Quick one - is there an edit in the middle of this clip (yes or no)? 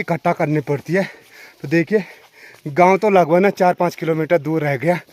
no